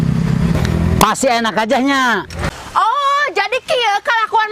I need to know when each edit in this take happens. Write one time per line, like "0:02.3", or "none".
0:02.4